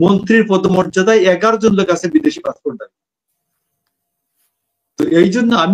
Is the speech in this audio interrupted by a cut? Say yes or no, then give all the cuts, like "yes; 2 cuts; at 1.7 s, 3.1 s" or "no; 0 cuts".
no; 0 cuts